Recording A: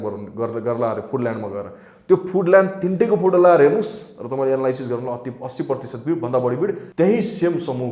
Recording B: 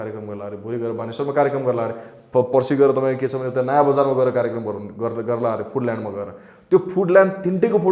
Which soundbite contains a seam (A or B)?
A